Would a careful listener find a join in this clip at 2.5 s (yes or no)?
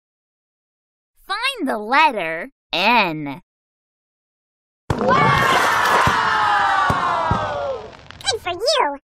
no